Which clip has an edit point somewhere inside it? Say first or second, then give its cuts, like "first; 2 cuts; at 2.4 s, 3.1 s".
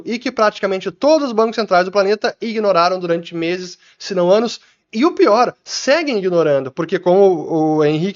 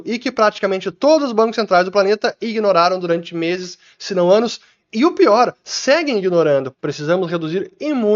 second; 1 cut; at 6.7 s